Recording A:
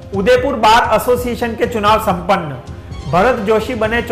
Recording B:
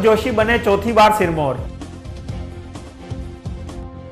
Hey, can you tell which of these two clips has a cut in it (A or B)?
B